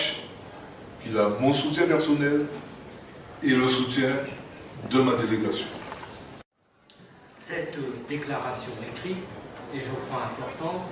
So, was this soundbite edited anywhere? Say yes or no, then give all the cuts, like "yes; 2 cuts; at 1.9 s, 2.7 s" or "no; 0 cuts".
yes; 1 cut; at 6.4 s